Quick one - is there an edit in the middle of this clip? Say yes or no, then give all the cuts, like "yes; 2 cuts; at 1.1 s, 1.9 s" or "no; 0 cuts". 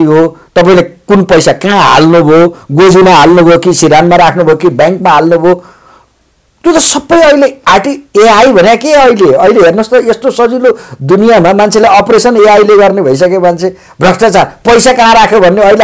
no; 0 cuts